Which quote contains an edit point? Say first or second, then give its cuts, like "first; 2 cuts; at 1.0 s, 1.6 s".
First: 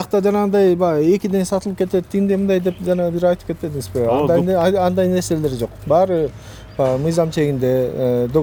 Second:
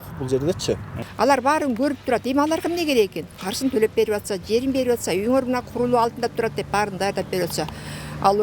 second; 1 cut; at 1.0 s